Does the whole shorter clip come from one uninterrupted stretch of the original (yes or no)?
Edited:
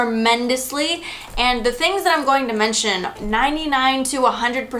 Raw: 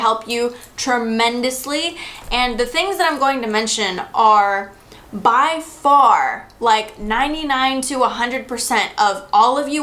no